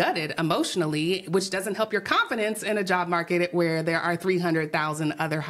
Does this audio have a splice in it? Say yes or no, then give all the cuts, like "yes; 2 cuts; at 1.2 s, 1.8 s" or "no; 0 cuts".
no; 0 cuts